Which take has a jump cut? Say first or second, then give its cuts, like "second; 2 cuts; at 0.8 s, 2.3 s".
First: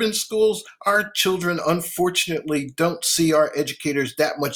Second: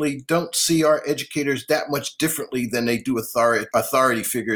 second; 1 cut; at 3.6 s